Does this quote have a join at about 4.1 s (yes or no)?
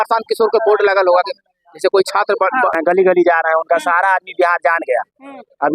no